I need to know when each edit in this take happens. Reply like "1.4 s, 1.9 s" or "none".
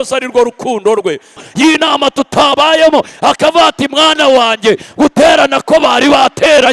1.4 s